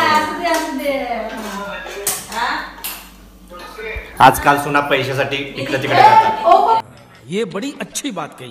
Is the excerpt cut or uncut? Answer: cut